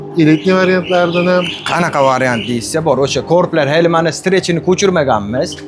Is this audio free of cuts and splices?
yes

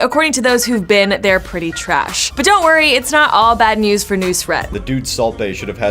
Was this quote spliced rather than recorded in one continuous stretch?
yes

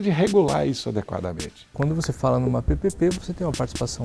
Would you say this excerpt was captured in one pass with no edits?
no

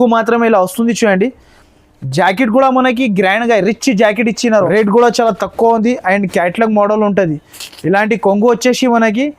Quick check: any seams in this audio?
yes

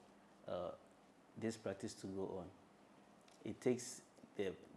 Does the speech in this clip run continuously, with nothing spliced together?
yes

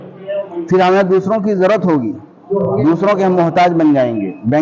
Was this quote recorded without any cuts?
yes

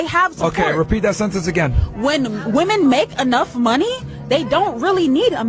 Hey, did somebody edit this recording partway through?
no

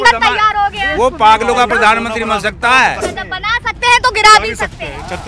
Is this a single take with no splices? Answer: no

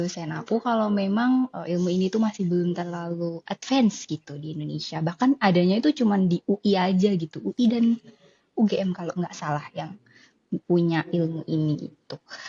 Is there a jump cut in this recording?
no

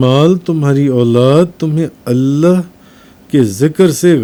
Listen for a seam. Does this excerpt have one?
no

